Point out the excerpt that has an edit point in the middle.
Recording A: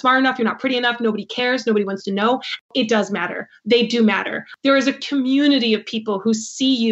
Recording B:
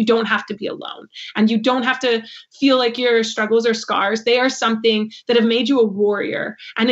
A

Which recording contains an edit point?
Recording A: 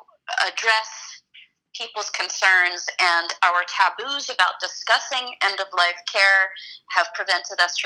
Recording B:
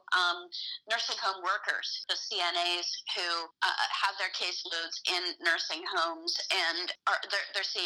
B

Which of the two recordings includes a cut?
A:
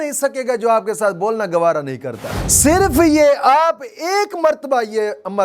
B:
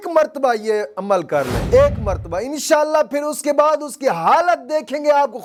A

